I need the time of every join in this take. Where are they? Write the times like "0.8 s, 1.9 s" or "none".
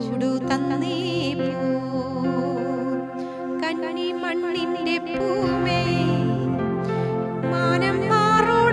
none